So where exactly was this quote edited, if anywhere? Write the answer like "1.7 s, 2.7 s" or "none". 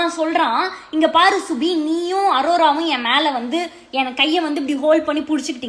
none